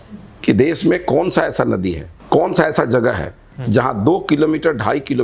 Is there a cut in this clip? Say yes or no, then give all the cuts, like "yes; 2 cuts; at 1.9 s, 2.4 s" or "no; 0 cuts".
yes; 1 cut; at 2.1 s